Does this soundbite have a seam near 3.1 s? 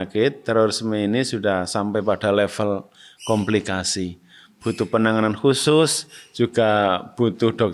no; 0 cuts

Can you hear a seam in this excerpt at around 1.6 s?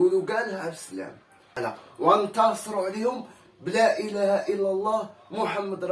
yes; 1 cut; at 1.6 s

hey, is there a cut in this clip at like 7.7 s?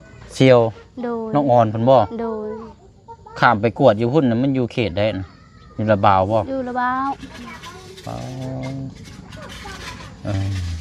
no; 0 cuts

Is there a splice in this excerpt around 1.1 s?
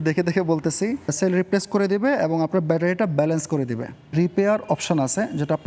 yes; 2 cuts; at 1.1 s, 4.1 s

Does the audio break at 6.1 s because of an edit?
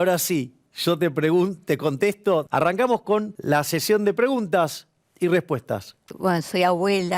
yes; 3 cuts; at 2.5 s, 3.3 s, 6.1 s

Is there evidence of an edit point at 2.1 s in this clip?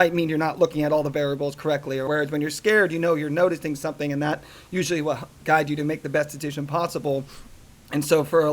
yes; 1 cut; at 2.1 s

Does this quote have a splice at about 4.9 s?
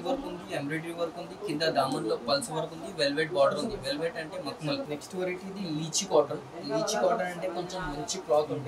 yes; 1 cut; at 4.9 s

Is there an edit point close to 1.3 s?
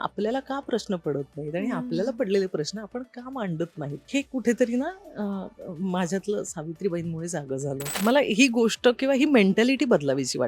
no; 2 cuts; at 4.0 s, 7.9 s

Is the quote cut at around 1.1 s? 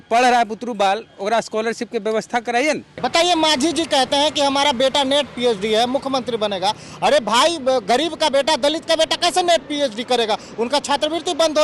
no; 1 cut; at 3.3 s

